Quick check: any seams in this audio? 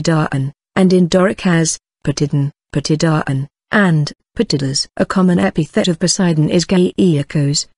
yes; 1 cut; at 1.4 s

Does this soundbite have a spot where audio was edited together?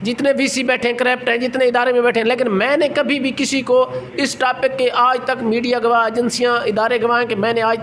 no; 0 cuts

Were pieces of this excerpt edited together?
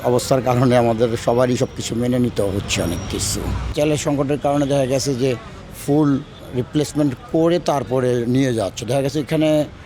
yes; 2 cuts; at 3.7 s, 6.4 s

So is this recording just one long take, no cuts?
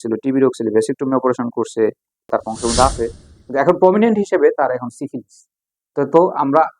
no; 1 cut; at 2.3 s

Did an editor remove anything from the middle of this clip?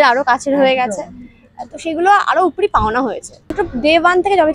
yes; 1 cut; at 3.5 s

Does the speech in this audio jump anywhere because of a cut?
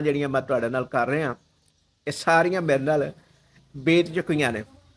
no; 0 cuts

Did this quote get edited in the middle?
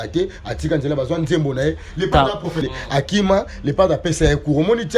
yes; 1 cut; at 2.6 s

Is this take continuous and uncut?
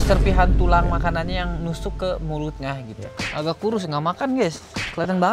no; 1 cut; at 3.1 s

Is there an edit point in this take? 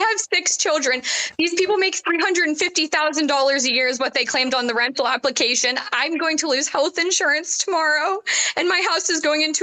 no; 0 cuts

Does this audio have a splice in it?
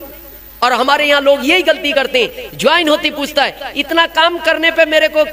no; 0 cuts

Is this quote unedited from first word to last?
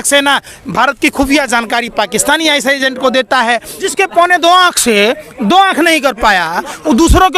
no; 1 cut; at 3.9 s

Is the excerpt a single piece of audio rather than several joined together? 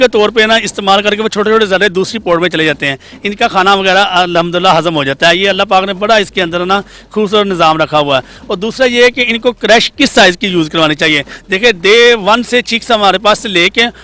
yes; 0 cuts

